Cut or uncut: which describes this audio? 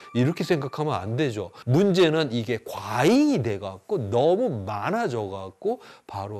cut